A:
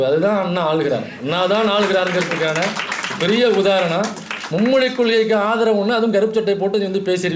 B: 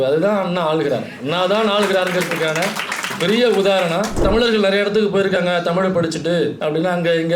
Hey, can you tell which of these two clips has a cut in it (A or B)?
B